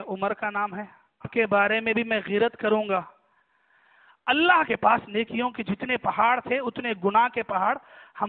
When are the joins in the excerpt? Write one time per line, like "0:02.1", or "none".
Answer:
0:01.3
0:04.7